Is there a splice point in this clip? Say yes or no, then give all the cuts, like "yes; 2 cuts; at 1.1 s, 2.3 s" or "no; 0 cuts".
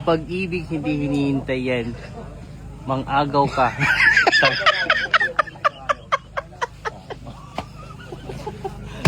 no; 0 cuts